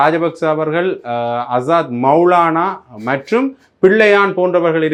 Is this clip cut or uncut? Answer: uncut